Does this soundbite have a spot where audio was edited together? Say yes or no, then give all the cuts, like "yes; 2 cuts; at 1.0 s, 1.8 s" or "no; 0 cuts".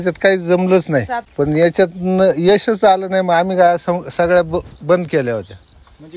yes; 1 cut; at 1.2 s